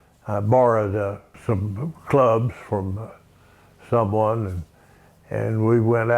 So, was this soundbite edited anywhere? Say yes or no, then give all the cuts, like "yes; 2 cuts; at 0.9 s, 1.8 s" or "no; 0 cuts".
yes; 1 cut; at 1.3 s